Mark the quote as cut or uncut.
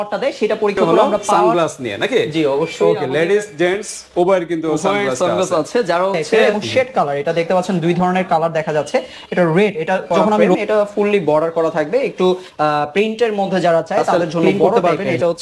cut